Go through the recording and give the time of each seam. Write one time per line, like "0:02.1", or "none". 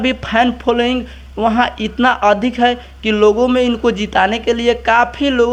none